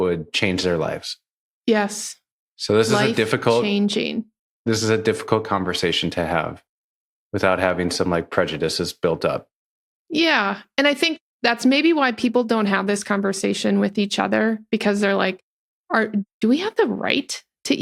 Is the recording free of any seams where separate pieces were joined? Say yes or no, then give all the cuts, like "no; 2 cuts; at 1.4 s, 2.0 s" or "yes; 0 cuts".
yes; 0 cuts